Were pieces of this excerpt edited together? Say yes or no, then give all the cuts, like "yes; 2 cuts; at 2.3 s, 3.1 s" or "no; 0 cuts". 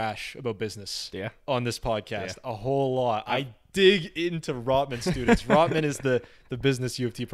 no; 0 cuts